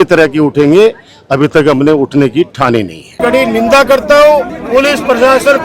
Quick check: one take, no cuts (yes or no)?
no